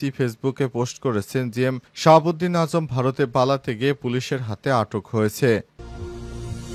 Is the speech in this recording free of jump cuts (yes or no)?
no